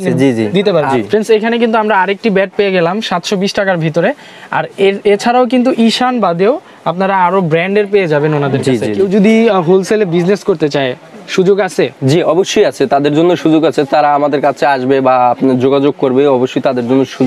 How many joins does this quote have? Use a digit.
2